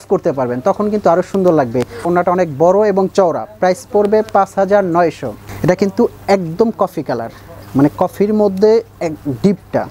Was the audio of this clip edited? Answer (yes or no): no